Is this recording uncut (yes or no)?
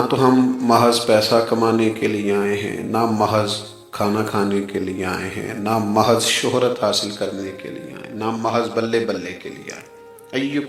yes